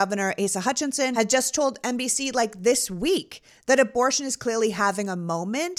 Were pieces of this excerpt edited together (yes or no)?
yes